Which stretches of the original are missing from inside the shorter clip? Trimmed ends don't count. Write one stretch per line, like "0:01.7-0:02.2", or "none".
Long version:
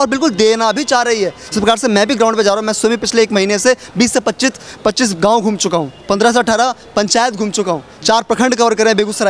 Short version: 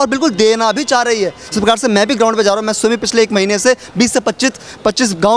none